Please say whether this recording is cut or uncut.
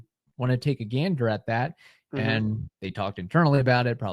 uncut